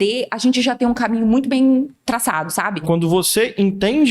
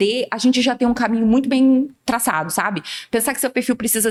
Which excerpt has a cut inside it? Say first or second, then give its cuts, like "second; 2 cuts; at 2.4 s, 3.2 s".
first; 1 cut; at 2.8 s